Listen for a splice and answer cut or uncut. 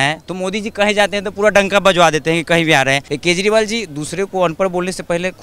cut